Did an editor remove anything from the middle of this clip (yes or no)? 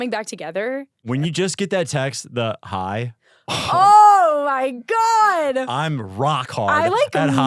yes